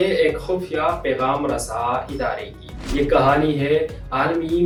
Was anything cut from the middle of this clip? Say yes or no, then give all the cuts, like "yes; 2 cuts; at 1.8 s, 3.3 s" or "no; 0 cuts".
no; 0 cuts